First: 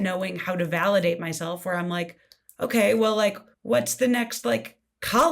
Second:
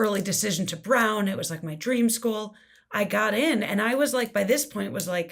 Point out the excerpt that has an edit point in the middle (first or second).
first